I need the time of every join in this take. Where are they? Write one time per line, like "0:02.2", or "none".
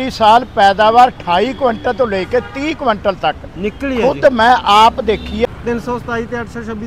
0:05.5